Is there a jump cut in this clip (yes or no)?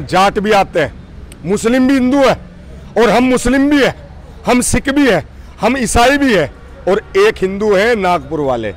no